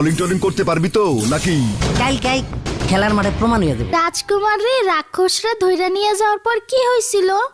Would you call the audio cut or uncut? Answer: cut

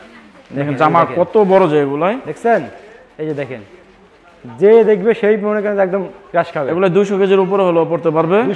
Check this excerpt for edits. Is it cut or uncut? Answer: uncut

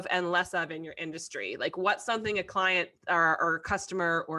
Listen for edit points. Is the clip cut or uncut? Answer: uncut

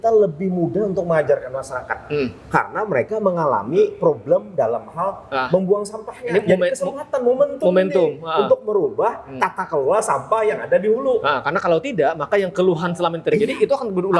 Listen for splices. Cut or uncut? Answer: uncut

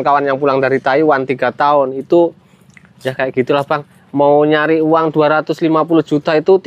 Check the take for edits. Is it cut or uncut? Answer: uncut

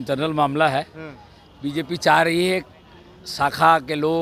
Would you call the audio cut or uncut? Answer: uncut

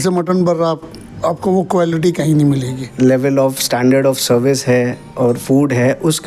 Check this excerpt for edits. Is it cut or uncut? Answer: cut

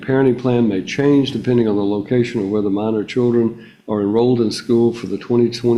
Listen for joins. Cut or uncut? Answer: uncut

